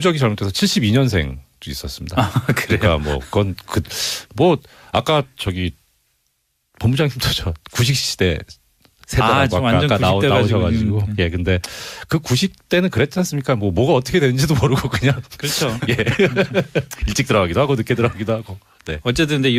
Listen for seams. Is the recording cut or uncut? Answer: uncut